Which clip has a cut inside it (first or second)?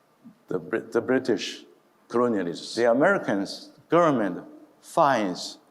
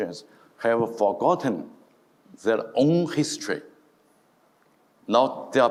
first